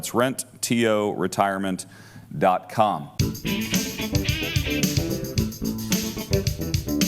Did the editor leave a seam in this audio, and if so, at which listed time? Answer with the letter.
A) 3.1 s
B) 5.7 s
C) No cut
A